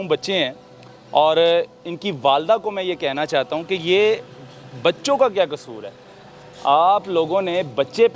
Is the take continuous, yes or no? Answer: yes